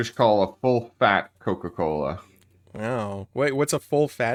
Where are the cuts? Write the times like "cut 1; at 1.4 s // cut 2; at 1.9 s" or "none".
none